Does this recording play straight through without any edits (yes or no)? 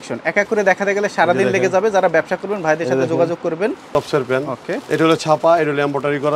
no